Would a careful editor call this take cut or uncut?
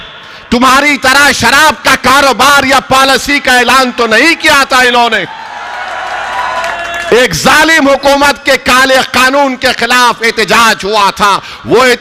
uncut